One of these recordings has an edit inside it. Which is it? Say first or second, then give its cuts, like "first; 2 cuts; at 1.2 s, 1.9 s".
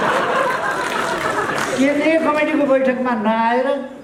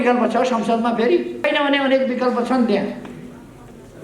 second; 1 cut; at 1.5 s